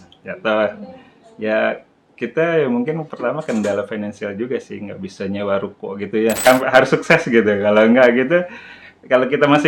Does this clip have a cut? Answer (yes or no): yes